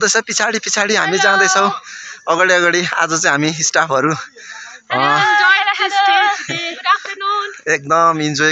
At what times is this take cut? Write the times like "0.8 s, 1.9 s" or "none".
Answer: none